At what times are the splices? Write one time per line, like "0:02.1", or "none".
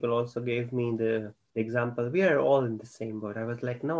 0:01.4